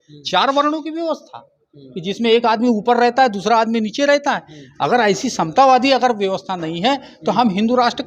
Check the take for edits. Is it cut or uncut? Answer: uncut